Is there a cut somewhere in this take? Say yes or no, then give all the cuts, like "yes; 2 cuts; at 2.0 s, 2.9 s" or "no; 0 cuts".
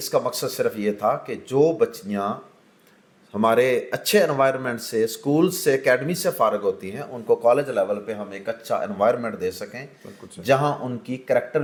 no; 0 cuts